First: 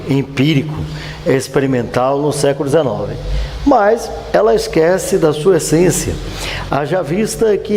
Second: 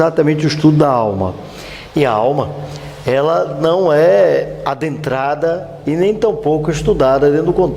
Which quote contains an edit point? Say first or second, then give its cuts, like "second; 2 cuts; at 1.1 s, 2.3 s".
second; 1 cut; at 6.8 s